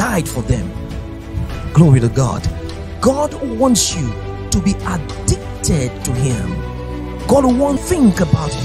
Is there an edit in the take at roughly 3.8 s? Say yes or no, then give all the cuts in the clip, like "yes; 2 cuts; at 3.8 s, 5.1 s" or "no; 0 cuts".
no; 1 cut; at 7.8 s